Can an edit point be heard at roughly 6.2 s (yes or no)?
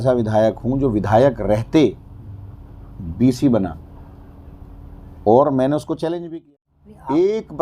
yes